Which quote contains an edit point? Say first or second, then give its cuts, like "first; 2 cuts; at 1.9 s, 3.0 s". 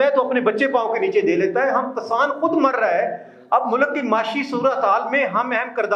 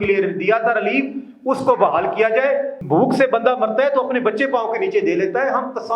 second; 1 cut; at 2.7 s